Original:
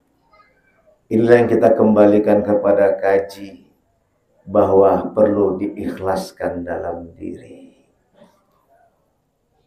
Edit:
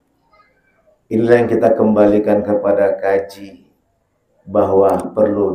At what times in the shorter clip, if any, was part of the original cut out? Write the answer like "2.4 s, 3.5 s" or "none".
none